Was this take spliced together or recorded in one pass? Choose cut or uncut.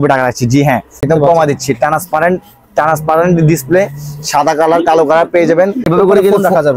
cut